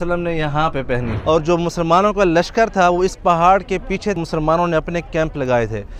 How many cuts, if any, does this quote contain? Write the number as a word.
two